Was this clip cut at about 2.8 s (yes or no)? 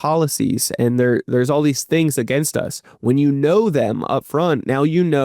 no